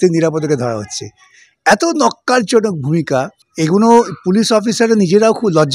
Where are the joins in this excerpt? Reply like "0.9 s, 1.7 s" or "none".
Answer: 3.4 s